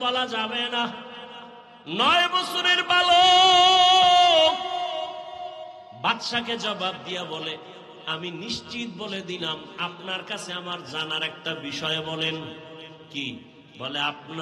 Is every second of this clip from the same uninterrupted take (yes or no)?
yes